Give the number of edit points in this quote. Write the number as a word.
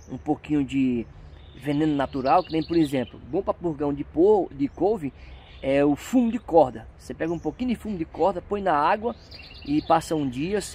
zero